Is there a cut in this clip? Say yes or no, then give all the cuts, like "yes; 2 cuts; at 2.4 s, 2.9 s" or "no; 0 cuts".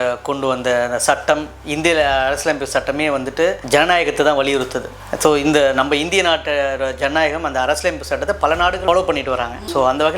yes; 1 cut; at 8.8 s